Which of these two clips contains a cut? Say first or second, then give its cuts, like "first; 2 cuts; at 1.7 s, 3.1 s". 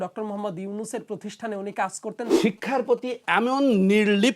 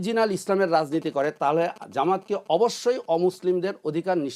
first; 1 cut; at 2.3 s